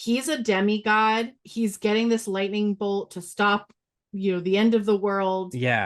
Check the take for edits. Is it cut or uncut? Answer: cut